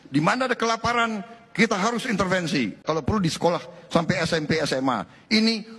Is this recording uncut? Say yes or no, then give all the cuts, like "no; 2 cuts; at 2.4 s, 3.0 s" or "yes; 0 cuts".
no; 1 cut; at 2.8 s